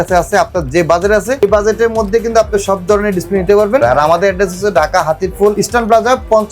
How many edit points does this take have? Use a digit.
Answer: 3